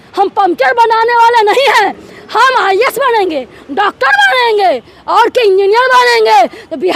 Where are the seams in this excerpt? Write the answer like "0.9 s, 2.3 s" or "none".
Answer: none

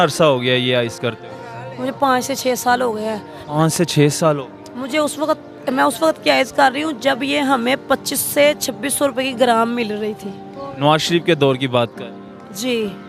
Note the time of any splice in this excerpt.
none

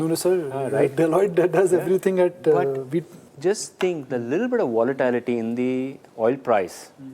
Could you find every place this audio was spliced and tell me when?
5.4 s

